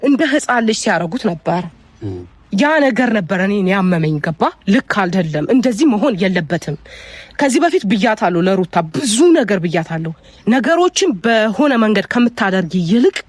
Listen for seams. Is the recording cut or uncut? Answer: uncut